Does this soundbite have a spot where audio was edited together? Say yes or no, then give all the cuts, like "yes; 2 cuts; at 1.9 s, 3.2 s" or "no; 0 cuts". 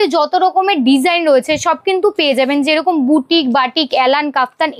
no; 0 cuts